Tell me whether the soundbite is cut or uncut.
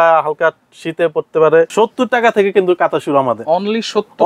cut